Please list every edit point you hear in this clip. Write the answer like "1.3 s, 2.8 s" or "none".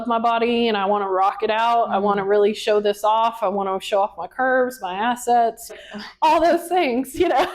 5.7 s